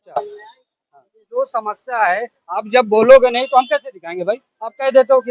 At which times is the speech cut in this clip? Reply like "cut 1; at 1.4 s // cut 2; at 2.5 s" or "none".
cut 1; at 1.2 s